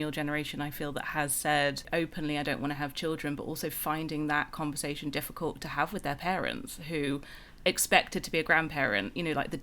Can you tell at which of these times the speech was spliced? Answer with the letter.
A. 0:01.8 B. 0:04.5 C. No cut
A